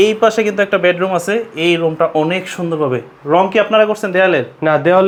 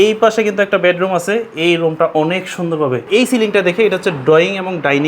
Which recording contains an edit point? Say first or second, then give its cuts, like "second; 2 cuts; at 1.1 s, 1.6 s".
second; 1 cut; at 3.0 s